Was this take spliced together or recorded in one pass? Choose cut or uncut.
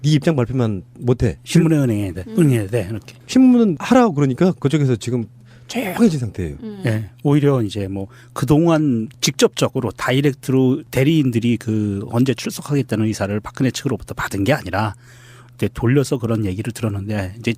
cut